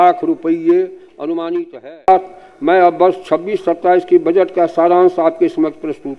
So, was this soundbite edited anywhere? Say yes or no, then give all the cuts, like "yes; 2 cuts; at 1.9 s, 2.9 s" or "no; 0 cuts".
yes; 1 cut; at 2.1 s